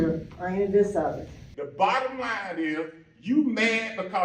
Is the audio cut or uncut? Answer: cut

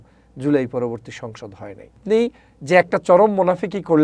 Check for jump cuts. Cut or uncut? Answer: cut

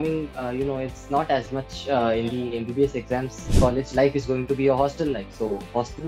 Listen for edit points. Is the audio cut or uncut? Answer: cut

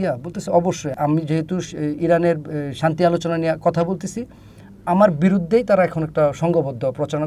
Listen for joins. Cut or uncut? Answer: cut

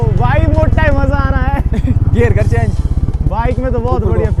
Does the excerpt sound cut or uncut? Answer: uncut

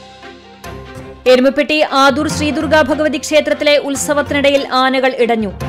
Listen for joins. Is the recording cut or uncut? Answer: cut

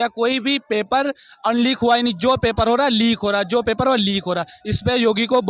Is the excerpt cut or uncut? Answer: uncut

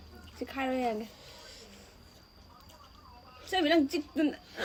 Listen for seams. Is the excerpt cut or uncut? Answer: uncut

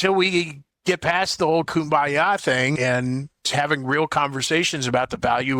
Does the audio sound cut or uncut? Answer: uncut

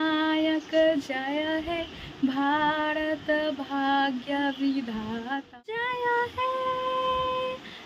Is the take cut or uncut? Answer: cut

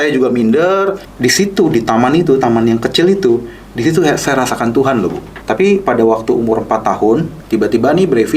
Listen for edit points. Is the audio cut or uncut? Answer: cut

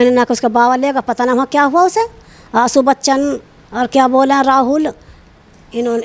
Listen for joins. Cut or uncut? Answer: uncut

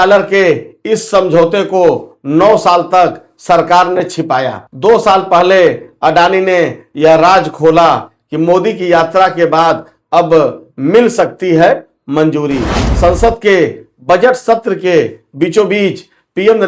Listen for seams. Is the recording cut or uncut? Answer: uncut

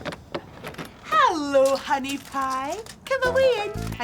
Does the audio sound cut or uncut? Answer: cut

